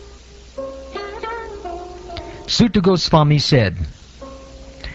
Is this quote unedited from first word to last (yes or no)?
yes